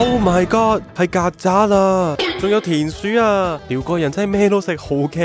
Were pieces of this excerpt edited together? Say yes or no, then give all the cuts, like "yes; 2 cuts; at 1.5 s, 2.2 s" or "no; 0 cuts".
yes; 2 cuts; at 2.2 s, 3.7 s